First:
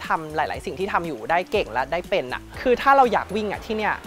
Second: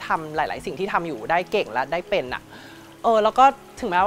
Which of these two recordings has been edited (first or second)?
first